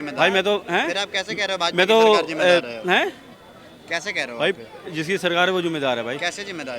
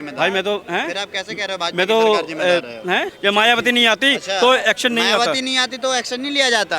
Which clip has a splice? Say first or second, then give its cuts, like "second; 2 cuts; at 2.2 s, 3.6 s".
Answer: second; 1 cut; at 3.1 s